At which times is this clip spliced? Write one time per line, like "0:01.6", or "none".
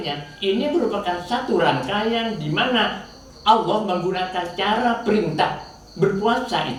none